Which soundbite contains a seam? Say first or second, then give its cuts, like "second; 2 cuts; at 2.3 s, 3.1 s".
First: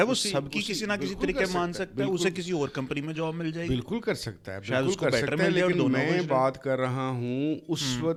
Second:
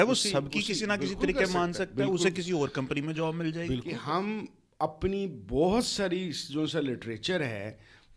second; 1 cut; at 3.8 s